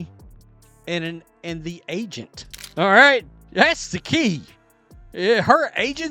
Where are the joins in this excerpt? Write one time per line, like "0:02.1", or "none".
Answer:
0:02.5